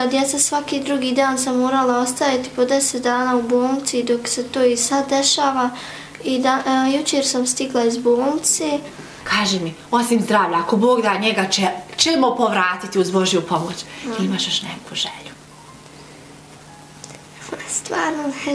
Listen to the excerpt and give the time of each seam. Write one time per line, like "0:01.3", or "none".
0:09.2